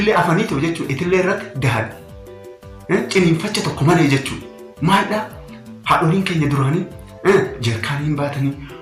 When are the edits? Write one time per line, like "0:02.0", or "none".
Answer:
none